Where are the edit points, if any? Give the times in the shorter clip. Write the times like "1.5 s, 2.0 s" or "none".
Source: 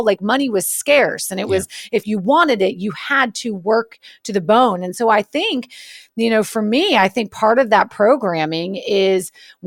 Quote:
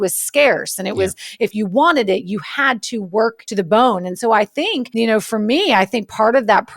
3.4 s, 4.8 s

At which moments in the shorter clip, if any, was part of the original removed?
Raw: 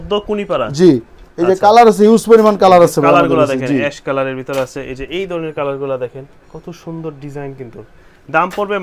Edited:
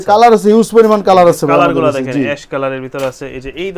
none

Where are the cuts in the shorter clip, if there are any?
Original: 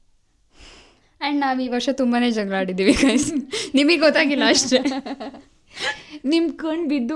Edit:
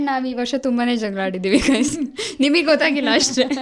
none

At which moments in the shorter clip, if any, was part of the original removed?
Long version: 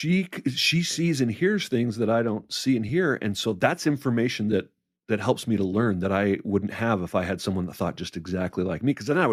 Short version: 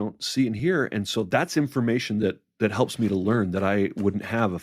2.5 s

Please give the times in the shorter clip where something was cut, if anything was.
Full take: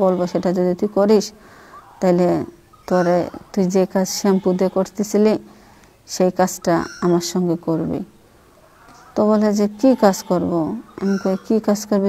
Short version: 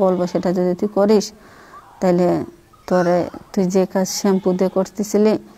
none

